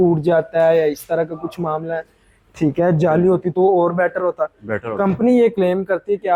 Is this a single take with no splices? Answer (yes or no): yes